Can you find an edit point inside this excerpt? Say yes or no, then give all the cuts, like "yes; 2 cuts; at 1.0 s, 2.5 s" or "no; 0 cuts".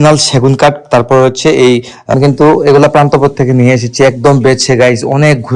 yes; 1 cut; at 2.1 s